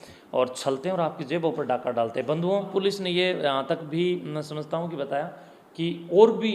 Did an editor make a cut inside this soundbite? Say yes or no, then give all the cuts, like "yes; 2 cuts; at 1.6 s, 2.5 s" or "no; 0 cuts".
yes; 1 cut; at 2.7 s